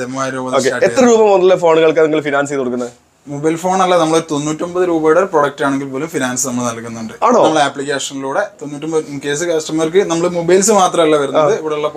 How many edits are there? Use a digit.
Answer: 0